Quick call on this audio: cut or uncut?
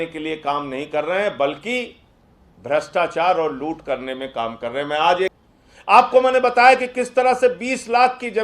cut